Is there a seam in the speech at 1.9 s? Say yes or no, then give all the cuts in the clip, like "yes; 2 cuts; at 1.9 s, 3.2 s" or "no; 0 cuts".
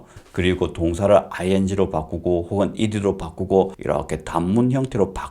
no; 1 cut; at 3.8 s